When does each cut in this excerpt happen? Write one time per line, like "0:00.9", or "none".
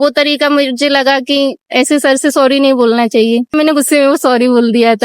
0:03.5